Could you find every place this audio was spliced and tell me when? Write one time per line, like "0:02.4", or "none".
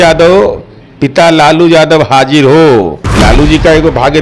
0:03.0